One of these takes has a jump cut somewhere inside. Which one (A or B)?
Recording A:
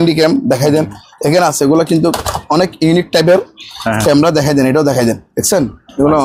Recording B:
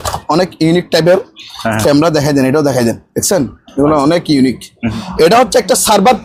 B